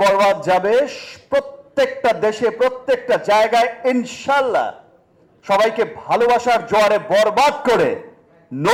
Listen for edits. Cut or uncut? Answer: uncut